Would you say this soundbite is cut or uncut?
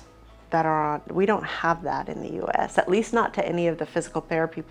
uncut